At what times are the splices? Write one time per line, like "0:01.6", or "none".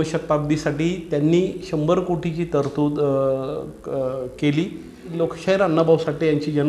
0:05.1